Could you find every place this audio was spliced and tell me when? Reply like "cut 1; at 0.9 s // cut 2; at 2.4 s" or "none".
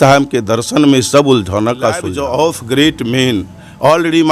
cut 1; at 2.1 s